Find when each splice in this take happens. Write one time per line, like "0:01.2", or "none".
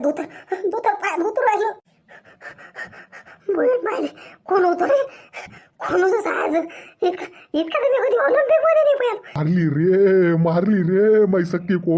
0:09.3